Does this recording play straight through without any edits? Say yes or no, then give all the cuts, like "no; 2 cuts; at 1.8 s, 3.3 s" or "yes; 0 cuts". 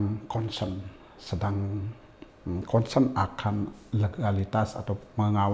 yes; 0 cuts